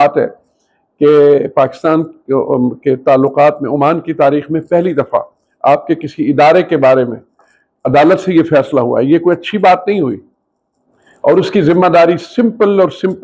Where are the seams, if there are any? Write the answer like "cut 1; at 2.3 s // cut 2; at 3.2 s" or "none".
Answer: none